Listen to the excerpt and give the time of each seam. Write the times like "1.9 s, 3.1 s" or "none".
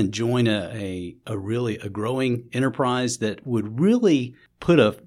none